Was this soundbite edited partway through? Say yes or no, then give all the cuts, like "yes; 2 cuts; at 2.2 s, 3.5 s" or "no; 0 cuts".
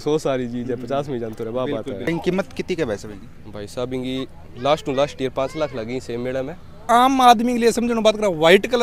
yes; 2 cuts; at 2.1 s, 6.8 s